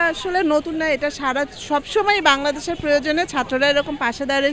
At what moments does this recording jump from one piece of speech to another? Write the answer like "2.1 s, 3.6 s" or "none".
none